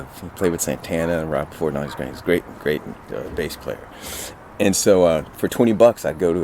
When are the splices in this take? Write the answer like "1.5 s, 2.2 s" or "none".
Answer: none